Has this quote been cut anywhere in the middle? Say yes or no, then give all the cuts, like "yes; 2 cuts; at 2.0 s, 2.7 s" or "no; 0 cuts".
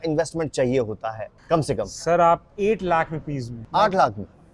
yes; 3 cuts; at 1.3 s, 2.5 s, 3.5 s